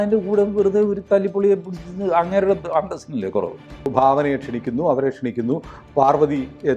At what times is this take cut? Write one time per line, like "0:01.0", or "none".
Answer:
0:03.9

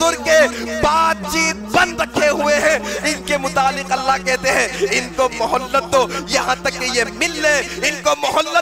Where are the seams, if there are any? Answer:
none

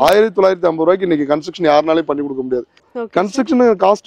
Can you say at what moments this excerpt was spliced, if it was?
0:02.8

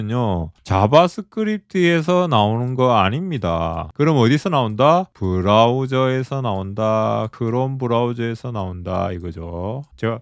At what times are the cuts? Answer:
none

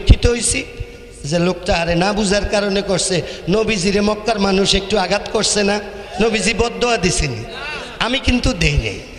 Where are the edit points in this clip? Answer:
none

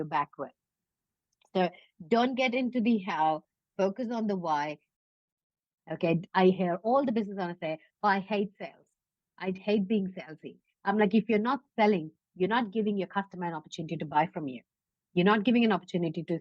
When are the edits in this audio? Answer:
0:05.2
0:09.6

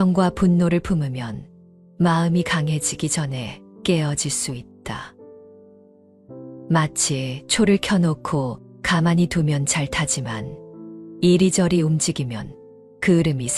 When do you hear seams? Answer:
none

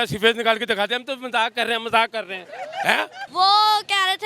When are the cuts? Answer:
0:03.2

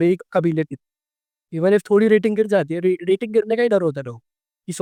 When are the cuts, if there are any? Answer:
none

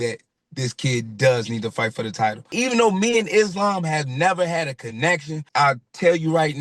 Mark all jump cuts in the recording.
0:02.5
0:05.4

